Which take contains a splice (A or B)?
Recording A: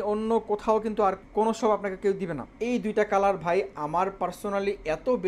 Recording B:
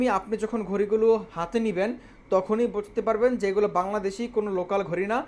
A